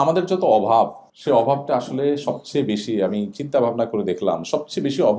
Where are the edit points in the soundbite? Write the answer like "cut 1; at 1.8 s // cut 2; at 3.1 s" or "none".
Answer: cut 1; at 1.1 s

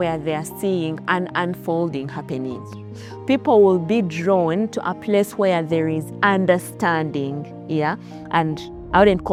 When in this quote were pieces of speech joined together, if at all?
none

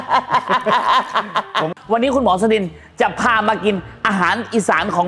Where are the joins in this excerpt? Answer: cut 1; at 1.7 s

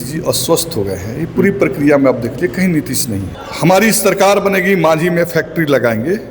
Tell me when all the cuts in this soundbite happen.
cut 1; at 3.3 s

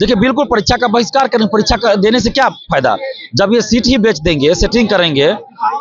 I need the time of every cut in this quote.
none

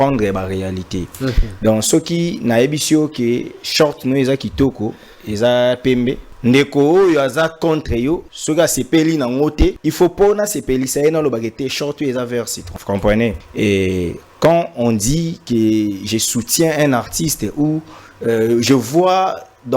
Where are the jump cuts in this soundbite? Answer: cut 1; at 6.3 s // cut 2; at 8.3 s // cut 3; at 9.8 s // cut 4; at 12.7 s // cut 5; at 13.4 s

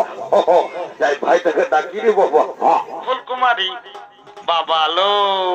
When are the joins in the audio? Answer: cut 1; at 3.0 s

